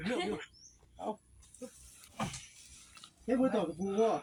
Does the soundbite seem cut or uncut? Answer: uncut